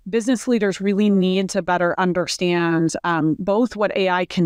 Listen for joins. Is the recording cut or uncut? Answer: uncut